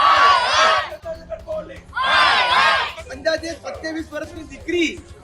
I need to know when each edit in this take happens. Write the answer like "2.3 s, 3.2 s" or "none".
3.0 s